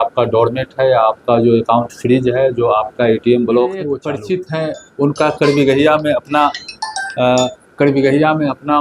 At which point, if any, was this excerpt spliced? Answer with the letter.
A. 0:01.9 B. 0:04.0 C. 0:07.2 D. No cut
B